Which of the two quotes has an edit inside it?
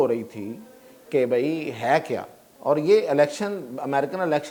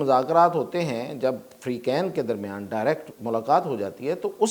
second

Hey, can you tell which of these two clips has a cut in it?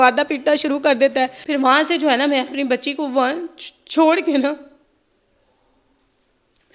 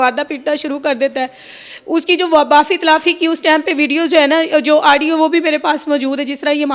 first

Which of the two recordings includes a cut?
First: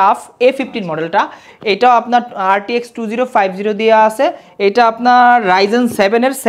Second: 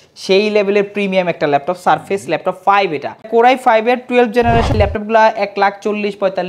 second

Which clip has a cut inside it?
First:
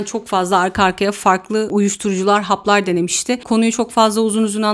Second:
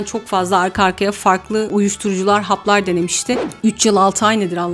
second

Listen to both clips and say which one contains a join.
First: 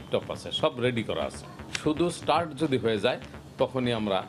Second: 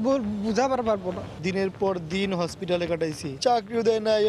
second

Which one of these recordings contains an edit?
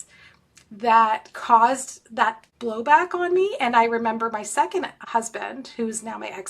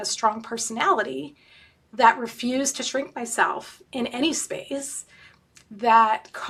first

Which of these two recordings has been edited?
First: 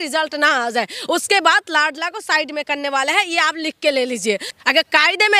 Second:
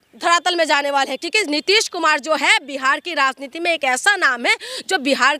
first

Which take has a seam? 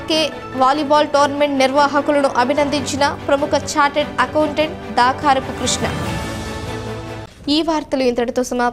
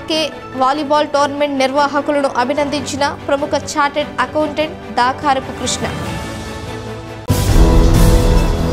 second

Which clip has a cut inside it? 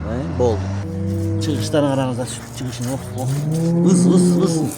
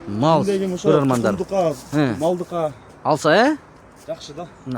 first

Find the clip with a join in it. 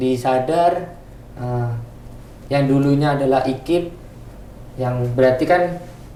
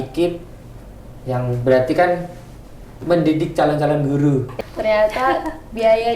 second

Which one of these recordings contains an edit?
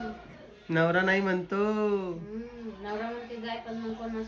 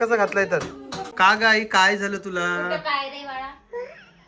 second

